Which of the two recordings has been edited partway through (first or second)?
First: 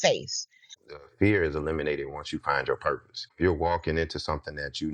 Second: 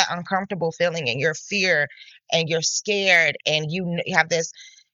first